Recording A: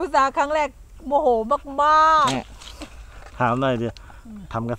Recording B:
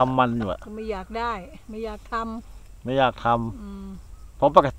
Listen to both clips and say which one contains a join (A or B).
A